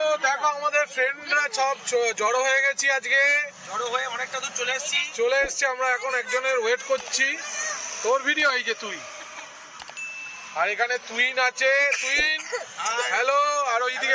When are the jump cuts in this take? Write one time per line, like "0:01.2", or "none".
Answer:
none